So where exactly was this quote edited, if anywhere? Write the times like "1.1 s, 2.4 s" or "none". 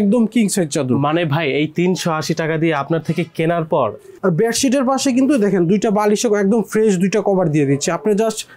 4.1 s